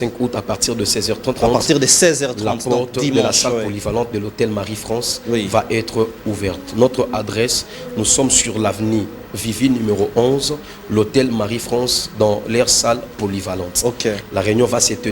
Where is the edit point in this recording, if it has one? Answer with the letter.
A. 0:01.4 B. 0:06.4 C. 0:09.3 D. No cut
A